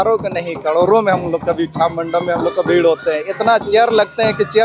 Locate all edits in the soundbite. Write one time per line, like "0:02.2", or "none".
none